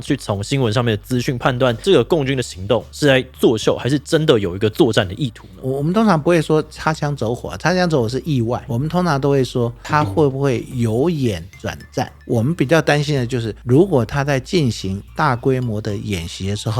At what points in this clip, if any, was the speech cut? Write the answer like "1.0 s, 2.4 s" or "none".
1.8 s, 8.7 s